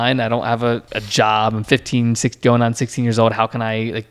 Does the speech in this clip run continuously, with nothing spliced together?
no; 1 cut; at 0.9 s

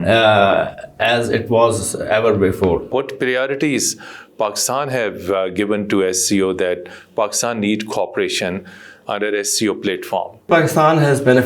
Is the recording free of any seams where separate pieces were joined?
no; 2 cuts; at 2.9 s, 10.5 s

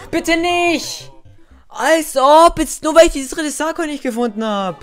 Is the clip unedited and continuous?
yes; 0 cuts

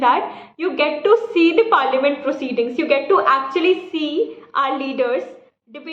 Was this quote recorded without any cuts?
yes; 0 cuts

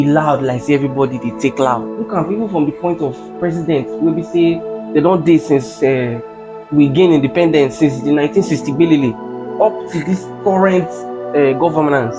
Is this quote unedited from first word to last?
yes; 0 cuts

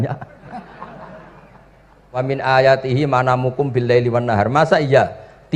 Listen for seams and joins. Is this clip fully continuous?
no; 1 cut; at 2.2 s

